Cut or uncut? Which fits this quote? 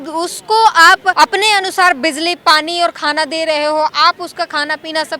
cut